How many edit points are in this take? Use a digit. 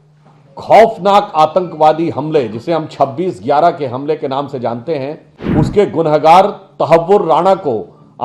1